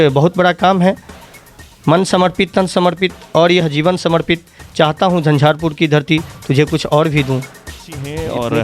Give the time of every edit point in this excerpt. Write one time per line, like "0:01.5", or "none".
none